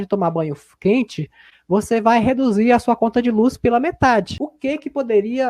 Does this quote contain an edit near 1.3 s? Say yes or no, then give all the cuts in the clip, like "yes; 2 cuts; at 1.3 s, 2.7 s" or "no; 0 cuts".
no; 1 cut; at 4.4 s